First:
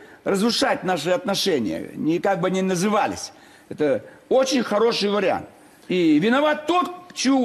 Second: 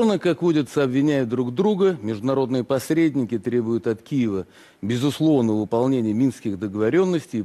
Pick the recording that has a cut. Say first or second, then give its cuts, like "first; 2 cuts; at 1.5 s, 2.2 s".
first; 1 cut; at 5.2 s